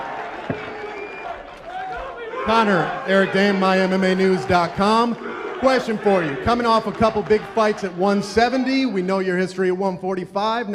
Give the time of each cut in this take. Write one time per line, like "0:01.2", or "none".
0:02.4